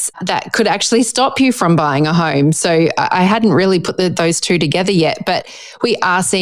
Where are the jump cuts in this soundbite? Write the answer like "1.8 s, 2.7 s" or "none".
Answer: none

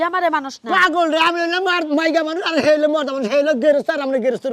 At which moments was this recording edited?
none

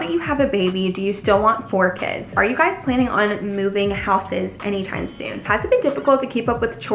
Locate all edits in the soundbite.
2.3 s, 5.4 s

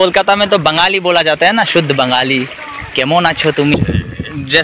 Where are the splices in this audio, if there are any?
3.7 s

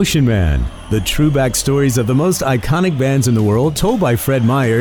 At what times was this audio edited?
none

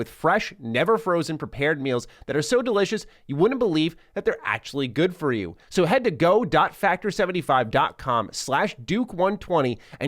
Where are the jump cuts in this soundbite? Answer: 5.6 s

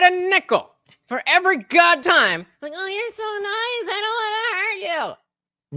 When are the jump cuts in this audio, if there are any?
2.0 s

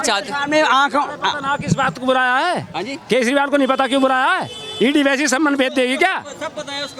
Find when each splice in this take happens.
none

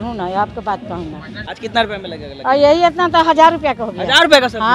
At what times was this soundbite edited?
1.6 s

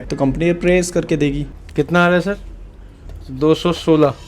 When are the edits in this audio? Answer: 1.5 s

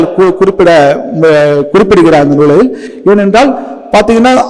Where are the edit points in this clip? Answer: none

